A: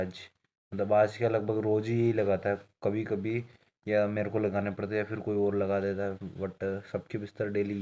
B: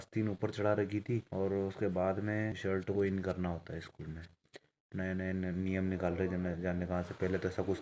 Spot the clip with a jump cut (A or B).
B